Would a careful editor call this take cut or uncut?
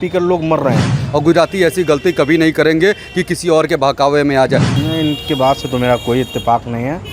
cut